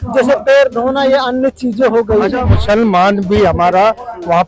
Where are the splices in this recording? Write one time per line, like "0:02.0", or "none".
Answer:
0:02.6